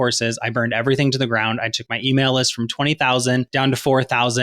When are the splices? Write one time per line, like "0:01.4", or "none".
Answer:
0:03.5